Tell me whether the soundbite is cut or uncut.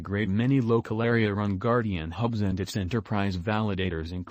uncut